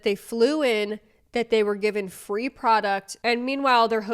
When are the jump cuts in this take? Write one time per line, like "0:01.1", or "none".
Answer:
0:03.2